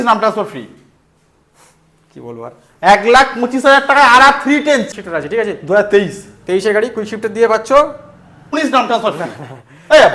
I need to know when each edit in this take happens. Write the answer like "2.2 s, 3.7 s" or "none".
4.9 s, 8.5 s